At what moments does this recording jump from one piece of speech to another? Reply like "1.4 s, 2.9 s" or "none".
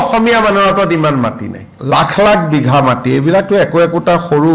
1.7 s